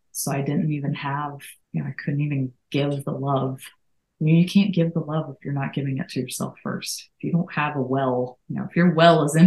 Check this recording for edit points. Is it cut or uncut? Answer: cut